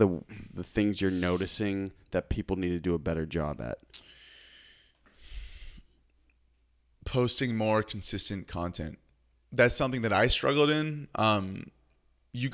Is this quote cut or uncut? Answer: uncut